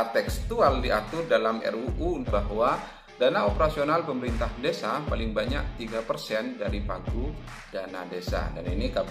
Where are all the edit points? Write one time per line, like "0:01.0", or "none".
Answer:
0:02.2